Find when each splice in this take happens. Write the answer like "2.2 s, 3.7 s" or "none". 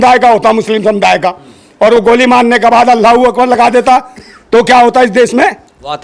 none